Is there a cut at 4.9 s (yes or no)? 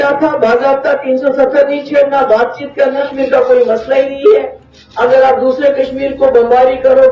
no